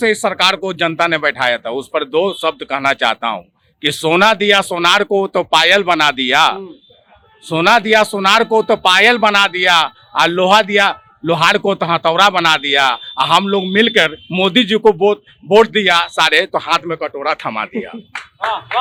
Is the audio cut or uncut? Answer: uncut